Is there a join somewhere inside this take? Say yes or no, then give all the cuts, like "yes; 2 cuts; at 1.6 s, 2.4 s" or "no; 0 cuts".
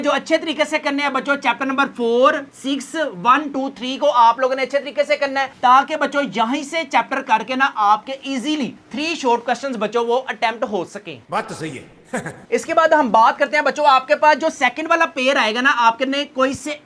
no; 0 cuts